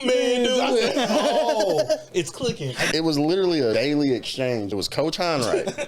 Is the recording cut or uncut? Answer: cut